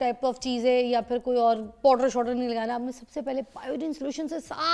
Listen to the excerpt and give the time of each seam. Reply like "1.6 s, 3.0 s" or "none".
none